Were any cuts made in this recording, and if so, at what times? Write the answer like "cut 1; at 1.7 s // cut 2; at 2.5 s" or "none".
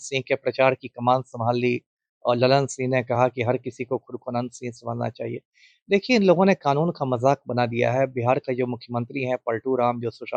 none